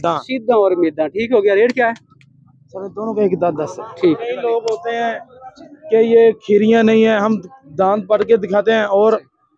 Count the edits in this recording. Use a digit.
1